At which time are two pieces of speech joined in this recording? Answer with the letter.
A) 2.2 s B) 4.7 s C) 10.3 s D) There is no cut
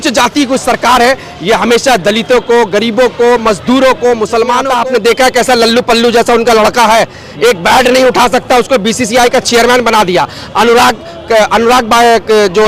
B